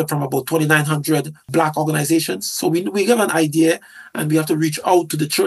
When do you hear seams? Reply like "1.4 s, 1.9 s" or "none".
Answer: 1.5 s